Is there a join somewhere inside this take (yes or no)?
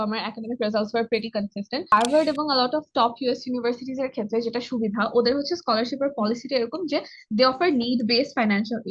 yes